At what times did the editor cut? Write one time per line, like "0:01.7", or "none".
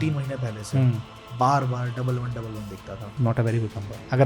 0:03.1